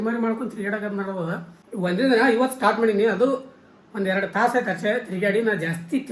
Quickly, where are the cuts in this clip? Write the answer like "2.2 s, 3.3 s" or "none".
1.6 s